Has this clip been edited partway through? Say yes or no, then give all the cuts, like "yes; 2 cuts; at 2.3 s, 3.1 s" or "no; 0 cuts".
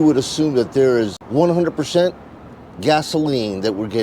yes; 1 cut; at 1.2 s